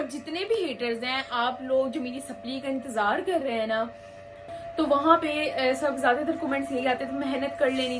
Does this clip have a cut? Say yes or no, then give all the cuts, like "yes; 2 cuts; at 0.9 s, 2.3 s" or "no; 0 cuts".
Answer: yes; 1 cut; at 4.5 s